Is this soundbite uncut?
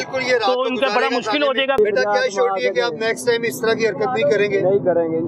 no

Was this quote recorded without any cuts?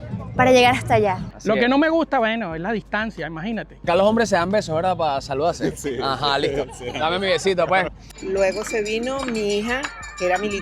no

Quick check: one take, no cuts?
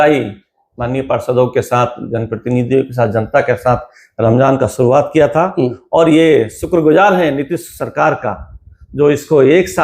yes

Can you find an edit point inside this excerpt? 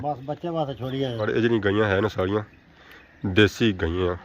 yes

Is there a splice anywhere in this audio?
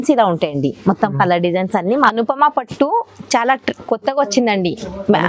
yes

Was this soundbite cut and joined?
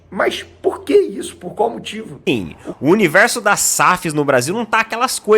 yes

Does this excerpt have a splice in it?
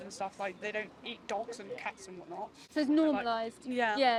no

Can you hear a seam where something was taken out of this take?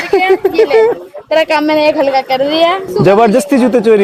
yes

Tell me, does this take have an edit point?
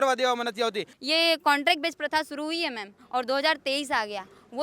yes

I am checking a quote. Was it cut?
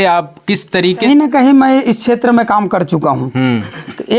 yes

